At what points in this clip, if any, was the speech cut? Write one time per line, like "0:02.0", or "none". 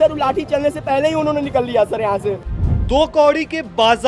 0:02.4